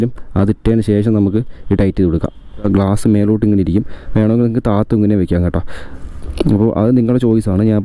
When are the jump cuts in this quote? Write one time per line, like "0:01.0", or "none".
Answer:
0:02.6